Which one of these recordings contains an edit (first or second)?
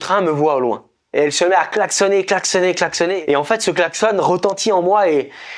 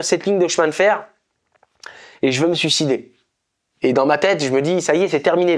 first